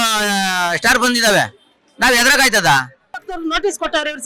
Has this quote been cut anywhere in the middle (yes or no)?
yes